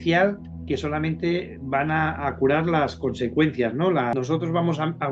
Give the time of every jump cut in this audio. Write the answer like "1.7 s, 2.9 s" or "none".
4.1 s